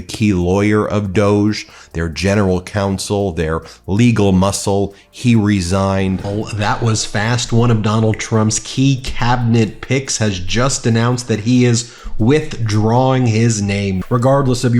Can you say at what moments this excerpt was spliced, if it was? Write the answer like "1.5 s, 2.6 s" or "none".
6.2 s, 14.0 s